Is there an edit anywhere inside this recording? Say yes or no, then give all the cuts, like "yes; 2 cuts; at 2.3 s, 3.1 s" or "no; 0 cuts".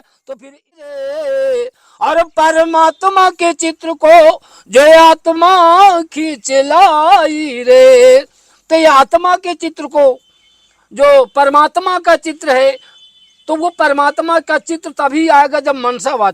yes; 1 cut; at 0.9 s